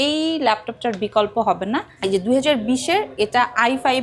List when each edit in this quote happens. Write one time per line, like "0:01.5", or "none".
0:01.9